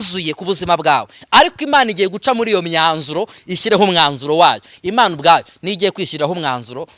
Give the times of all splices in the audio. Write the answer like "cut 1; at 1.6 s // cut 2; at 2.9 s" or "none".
none